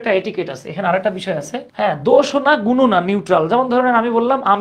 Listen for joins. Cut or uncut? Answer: cut